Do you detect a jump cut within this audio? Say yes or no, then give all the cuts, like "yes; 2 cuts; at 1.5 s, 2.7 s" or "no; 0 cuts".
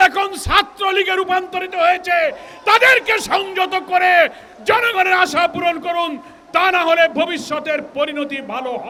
no; 0 cuts